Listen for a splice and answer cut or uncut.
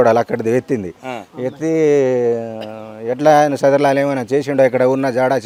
uncut